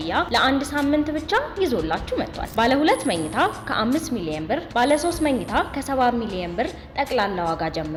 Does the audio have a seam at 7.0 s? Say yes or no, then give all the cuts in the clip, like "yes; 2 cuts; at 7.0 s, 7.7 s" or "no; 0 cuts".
no; 0 cuts